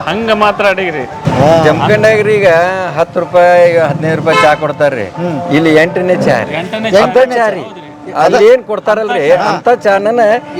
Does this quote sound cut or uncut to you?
cut